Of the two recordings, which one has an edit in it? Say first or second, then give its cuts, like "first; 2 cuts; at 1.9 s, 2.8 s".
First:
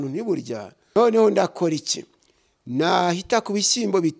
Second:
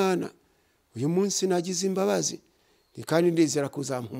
first; 1 cut; at 1.0 s